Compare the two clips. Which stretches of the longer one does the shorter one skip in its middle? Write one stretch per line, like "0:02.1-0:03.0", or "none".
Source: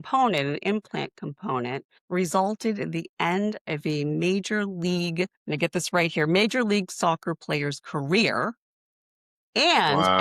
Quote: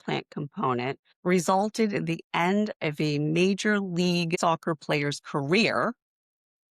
0:05.2-0:06.9